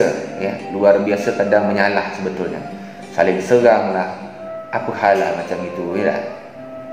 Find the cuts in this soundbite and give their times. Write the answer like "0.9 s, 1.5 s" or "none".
none